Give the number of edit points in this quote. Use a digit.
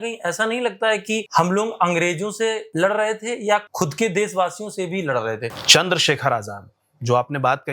4